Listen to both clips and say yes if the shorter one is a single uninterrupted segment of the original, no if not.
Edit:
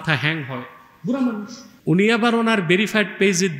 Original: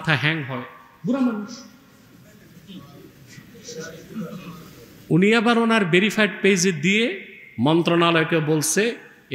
no